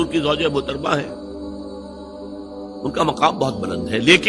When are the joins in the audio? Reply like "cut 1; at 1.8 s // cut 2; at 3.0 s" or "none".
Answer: none